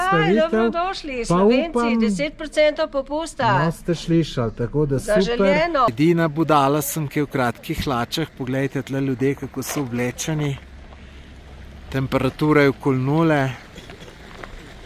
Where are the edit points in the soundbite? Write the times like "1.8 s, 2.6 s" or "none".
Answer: 5.9 s